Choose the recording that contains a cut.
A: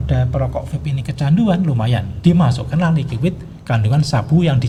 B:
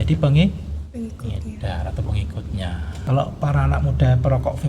B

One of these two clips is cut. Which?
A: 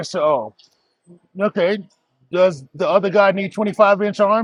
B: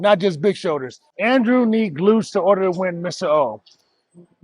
B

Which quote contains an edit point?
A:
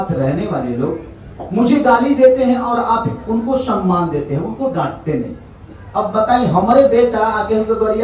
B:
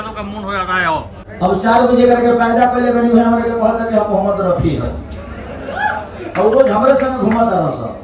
B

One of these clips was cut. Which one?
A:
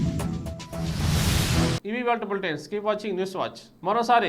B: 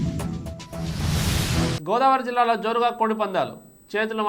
B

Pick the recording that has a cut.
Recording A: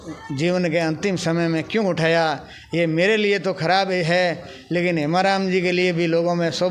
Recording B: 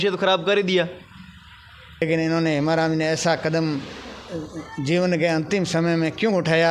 B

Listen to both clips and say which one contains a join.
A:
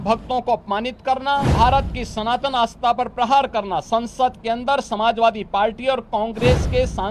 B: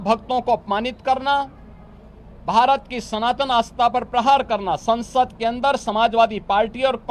A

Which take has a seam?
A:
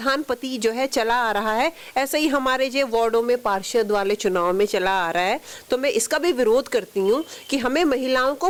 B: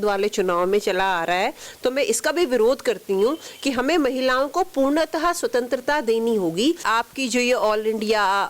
B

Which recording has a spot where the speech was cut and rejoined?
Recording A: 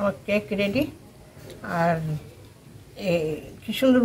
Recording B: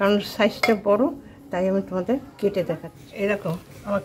B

